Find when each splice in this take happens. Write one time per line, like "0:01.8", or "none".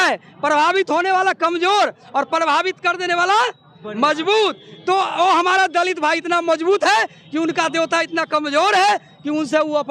none